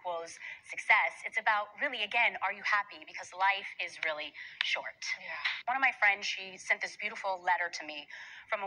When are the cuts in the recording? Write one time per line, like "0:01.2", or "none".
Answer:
0:05.5
0:06.1